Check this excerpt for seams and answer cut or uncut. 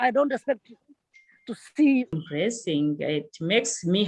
cut